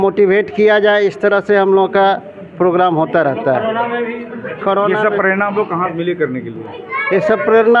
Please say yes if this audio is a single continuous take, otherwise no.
yes